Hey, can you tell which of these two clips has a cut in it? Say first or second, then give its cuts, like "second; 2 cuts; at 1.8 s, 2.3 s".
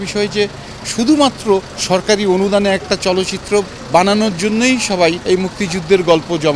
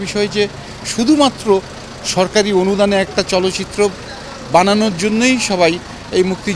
first; 3 cuts; at 1.7 s, 3.8 s, 5.2 s